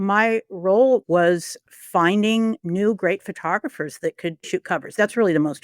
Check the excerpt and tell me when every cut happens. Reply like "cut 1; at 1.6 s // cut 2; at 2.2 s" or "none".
cut 1; at 1.0 s // cut 2; at 2.6 s // cut 3; at 4.5 s